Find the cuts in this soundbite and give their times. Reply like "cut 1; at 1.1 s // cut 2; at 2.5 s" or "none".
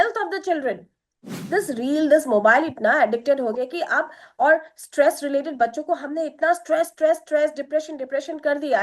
cut 1; at 1.4 s